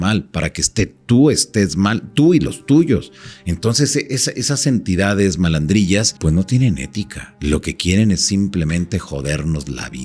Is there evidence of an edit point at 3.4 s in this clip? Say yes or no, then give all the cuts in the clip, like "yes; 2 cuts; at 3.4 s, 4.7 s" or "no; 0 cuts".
no; 2 cuts; at 6.1 s, 7.2 s